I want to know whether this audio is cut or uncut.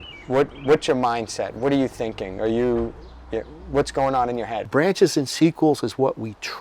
cut